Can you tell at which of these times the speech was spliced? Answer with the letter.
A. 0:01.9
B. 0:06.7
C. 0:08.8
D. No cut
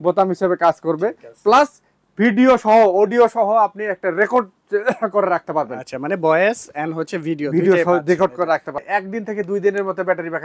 C